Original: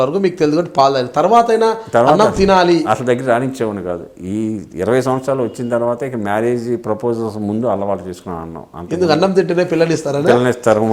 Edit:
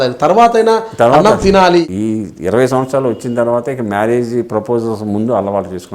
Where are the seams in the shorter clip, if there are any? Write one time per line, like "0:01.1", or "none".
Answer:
0:01.9